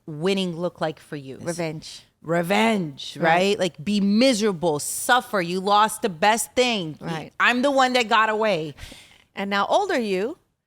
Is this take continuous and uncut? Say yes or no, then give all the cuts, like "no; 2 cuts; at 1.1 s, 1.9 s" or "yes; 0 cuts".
no; 1 cut; at 1.4 s